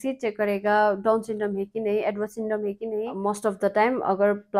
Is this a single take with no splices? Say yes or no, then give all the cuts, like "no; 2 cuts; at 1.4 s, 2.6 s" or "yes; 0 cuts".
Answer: no; 1 cut; at 3.1 s